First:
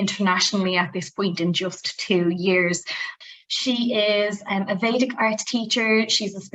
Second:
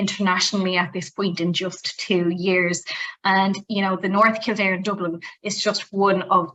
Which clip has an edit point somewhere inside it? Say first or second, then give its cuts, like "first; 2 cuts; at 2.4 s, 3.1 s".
first; 1 cut; at 3.1 s